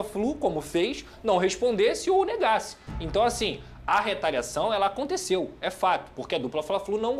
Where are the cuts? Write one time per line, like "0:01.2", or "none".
none